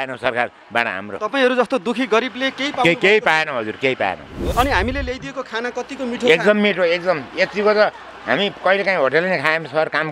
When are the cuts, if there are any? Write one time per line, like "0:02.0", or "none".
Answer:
0:04.5